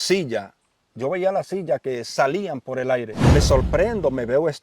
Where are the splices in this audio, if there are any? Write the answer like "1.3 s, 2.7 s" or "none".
3.2 s